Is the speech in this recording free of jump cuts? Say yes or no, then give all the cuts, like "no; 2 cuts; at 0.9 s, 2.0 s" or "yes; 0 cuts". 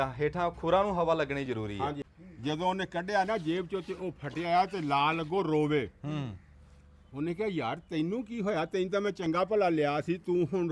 no; 1 cut; at 2.1 s